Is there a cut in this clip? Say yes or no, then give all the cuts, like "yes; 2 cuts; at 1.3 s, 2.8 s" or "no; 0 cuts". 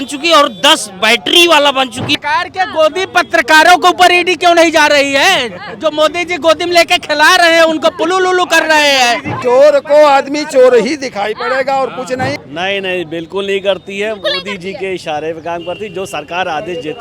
yes; 3 cuts; at 2.1 s, 9.4 s, 12.4 s